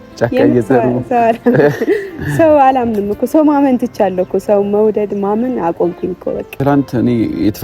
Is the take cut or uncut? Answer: cut